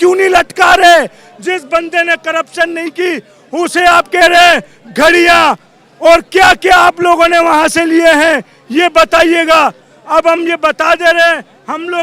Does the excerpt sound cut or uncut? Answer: uncut